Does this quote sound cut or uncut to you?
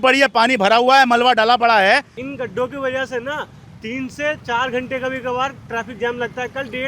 cut